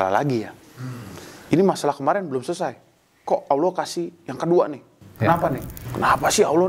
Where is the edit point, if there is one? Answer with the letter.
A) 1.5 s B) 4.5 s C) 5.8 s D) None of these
C